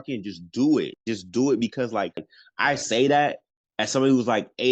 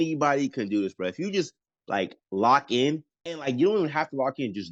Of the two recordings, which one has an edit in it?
first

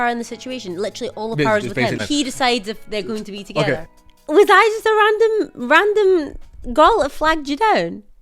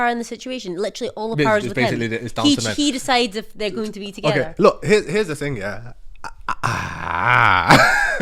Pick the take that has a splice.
first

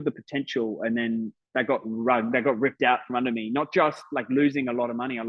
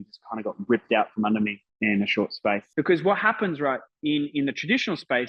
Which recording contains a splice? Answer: second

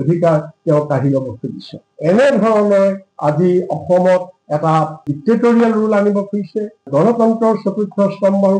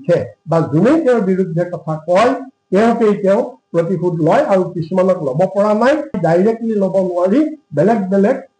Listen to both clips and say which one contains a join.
first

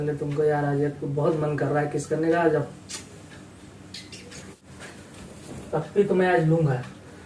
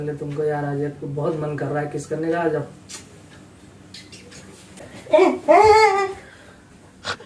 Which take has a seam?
first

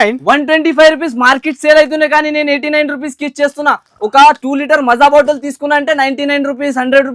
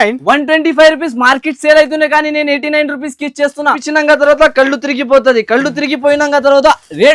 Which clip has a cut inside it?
second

